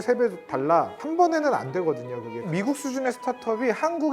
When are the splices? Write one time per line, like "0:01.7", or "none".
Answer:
0:01.0
0:02.5